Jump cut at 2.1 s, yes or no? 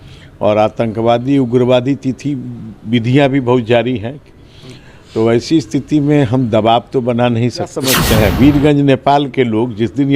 no